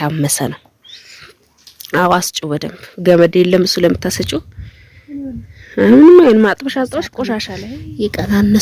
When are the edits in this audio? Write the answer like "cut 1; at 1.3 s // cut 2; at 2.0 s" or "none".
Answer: cut 1; at 7.5 s